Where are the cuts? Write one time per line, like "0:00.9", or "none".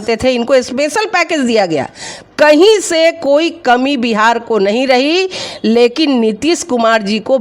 none